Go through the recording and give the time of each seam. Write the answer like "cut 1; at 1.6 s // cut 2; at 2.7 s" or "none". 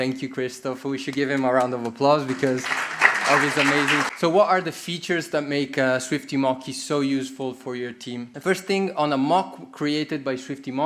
cut 1; at 4.1 s // cut 2; at 8.3 s